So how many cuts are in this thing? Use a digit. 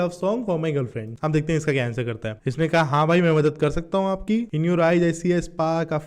3